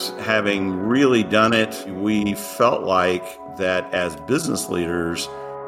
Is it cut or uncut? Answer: cut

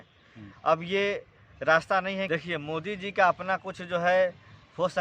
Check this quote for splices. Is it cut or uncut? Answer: cut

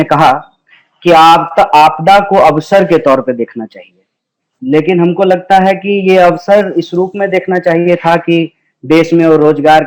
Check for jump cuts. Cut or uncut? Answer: uncut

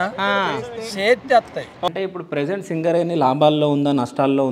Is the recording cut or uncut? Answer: cut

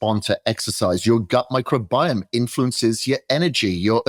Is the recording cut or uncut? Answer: uncut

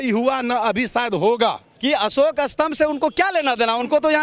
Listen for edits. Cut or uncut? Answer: cut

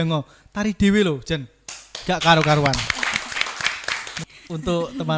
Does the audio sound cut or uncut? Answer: cut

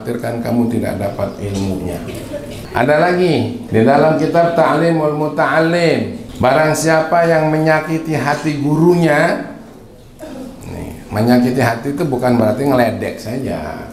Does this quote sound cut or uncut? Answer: cut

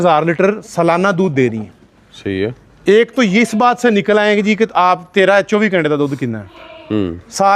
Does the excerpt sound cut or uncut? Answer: uncut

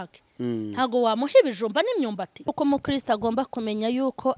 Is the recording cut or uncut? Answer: cut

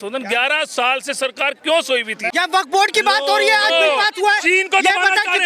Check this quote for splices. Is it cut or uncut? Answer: cut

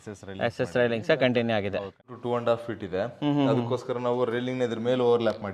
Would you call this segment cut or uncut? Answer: cut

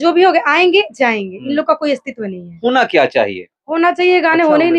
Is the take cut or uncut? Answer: uncut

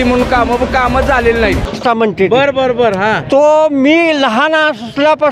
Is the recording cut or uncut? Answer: cut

